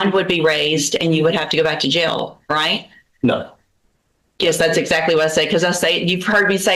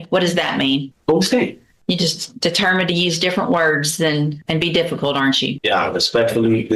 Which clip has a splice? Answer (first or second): second